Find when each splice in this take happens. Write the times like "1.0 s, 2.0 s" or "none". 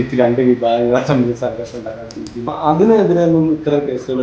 2.5 s